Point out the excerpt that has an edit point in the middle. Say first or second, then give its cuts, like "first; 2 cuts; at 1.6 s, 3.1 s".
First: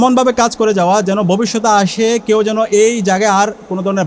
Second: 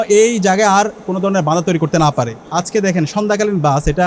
second; 1 cut; at 2.4 s